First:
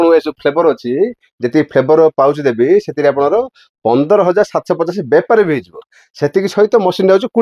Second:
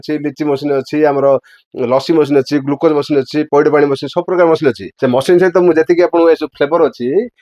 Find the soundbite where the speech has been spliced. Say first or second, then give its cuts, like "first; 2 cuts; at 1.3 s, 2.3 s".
second; 1 cut; at 4.9 s